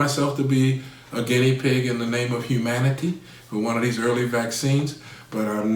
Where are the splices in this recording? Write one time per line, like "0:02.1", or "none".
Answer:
none